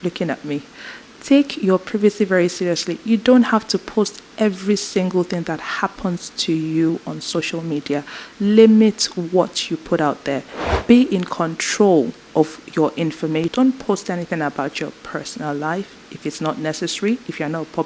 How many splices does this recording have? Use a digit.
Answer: 1